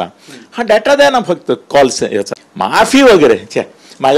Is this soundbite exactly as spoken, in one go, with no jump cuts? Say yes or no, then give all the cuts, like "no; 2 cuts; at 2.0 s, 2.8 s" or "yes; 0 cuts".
no; 1 cut; at 2.4 s